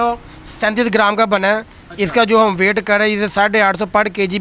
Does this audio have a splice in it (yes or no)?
no